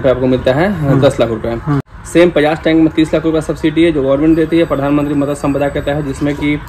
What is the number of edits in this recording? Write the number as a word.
zero